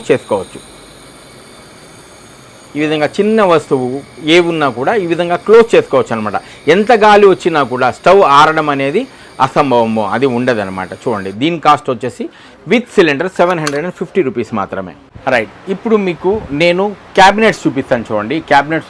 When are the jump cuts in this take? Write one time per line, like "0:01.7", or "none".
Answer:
none